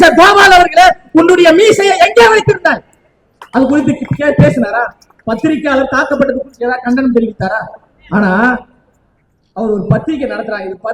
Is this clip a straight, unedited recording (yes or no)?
yes